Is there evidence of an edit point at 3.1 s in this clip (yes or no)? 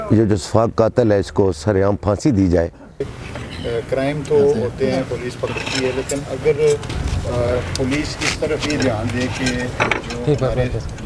yes